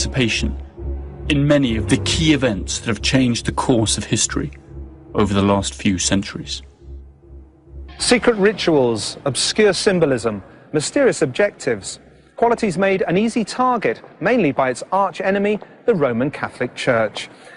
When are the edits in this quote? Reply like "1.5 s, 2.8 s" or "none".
16.0 s